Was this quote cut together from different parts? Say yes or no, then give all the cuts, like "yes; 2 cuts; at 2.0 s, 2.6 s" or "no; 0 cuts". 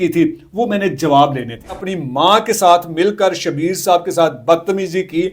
yes; 1 cut; at 1.9 s